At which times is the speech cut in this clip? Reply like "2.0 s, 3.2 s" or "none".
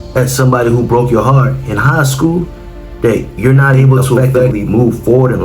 4.5 s